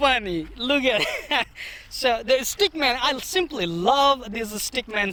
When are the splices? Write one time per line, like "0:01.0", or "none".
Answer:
none